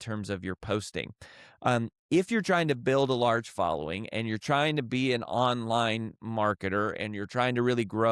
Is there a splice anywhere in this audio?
no; 0 cuts

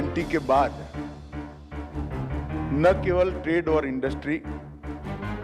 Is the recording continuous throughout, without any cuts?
no; 1 cut; at 4.4 s

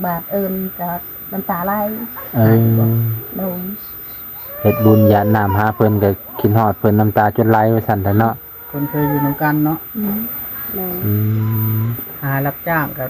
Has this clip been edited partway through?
yes; 1 cut; at 12.0 s

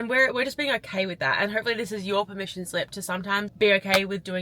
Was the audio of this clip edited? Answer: no; 0 cuts

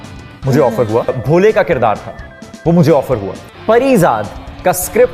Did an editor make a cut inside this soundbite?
no; 0 cuts

